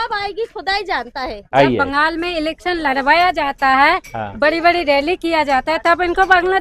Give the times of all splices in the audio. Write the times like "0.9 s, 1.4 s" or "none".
1.4 s